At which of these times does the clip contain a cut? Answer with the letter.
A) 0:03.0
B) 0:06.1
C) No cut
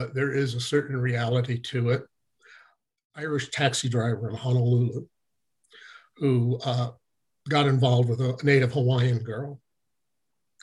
A